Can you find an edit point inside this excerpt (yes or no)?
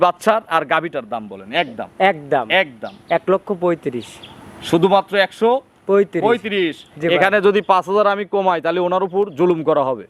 no